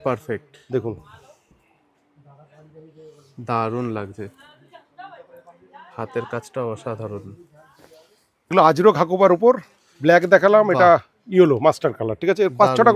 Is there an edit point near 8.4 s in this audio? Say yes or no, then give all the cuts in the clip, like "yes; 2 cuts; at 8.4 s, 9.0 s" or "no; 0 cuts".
yes; 1 cut; at 8.4 s